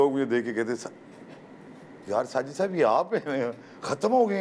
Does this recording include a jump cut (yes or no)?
no